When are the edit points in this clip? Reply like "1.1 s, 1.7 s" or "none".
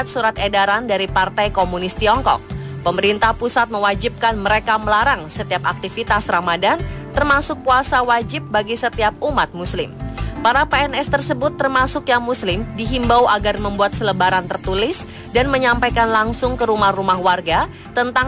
2.7 s